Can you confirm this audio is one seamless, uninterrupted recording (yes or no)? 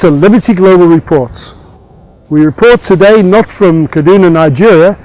yes